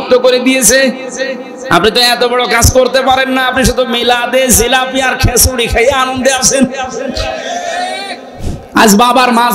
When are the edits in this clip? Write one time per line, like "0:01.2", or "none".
0:08.4